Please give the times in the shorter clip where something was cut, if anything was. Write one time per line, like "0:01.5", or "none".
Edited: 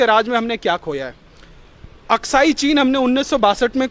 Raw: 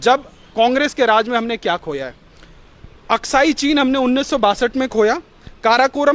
none